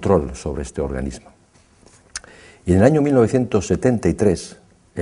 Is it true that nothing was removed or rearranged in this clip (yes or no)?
yes